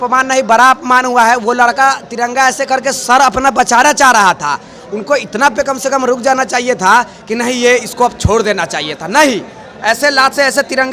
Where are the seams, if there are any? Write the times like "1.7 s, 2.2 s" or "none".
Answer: none